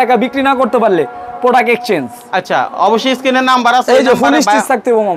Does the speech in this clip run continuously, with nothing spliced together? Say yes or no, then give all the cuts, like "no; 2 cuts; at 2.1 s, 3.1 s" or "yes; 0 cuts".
yes; 0 cuts